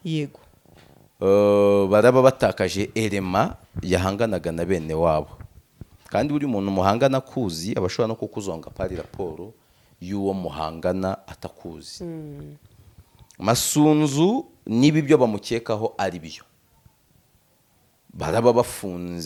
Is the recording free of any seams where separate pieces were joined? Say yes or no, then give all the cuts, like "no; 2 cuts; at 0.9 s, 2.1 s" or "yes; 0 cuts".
yes; 0 cuts